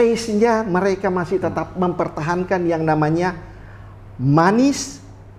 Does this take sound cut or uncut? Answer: uncut